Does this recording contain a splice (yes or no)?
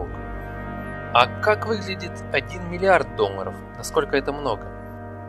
yes